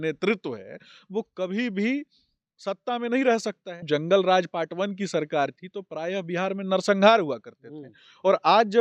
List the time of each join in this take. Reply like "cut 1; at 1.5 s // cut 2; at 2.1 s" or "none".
cut 1; at 3.8 s